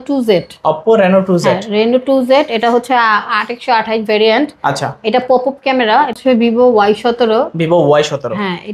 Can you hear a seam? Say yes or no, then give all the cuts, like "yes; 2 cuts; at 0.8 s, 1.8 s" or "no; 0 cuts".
yes; 1 cut; at 6.2 s